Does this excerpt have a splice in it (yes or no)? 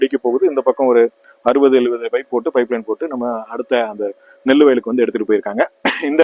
no